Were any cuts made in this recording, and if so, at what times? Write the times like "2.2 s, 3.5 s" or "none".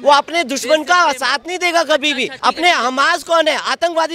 2.3 s